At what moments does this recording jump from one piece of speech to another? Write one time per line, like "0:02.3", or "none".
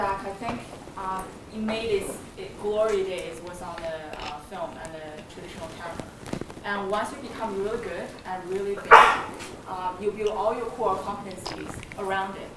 0:03.6